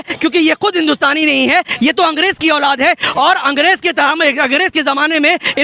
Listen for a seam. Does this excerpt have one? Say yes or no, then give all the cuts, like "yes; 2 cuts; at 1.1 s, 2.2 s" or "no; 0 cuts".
no; 0 cuts